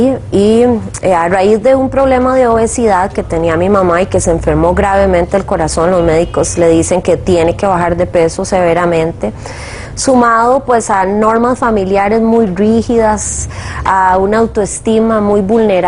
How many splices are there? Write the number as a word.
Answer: zero